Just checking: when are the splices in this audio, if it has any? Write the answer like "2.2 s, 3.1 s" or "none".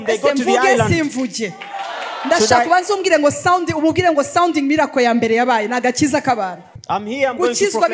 6.6 s